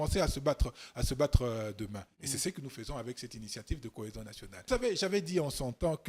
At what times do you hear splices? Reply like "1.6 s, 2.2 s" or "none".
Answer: 4.5 s